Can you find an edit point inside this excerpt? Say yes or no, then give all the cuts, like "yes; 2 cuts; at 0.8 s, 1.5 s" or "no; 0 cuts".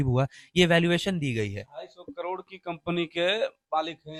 no; 0 cuts